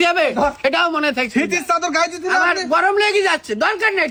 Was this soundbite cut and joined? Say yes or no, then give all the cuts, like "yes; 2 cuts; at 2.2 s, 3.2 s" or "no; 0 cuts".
no; 0 cuts